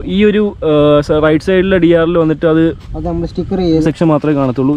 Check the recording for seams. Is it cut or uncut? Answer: cut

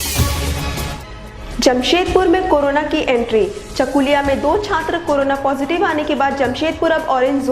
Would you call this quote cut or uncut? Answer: cut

